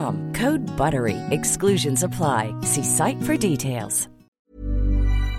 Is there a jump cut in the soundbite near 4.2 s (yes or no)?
yes